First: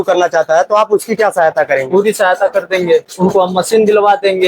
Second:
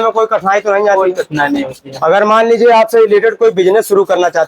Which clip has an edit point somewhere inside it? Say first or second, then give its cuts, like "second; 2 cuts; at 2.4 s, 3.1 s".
first; 1 cut; at 3.1 s